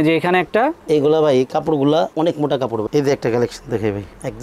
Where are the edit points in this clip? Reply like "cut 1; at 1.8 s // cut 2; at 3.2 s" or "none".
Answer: cut 1; at 2.8 s